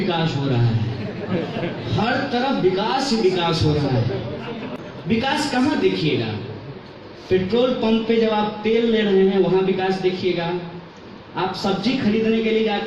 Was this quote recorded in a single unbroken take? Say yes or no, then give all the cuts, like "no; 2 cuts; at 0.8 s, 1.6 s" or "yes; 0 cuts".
no; 1 cut; at 4.8 s